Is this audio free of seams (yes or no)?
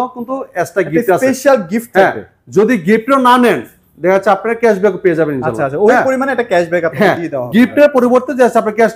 yes